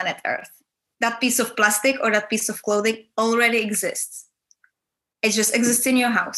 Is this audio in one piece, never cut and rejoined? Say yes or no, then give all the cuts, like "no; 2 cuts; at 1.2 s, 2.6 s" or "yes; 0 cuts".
yes; 0 cuts